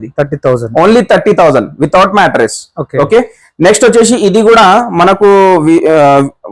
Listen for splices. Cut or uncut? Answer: uncut